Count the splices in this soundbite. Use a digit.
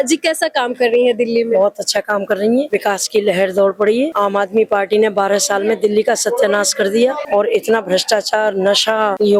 0